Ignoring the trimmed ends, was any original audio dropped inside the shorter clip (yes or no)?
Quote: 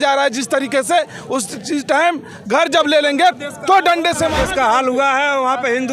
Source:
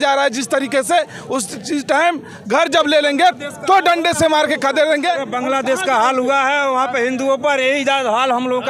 yes